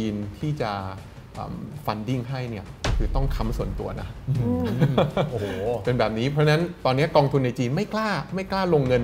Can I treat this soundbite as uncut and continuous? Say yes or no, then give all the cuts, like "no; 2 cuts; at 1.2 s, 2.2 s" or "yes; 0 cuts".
yes; 0 cuts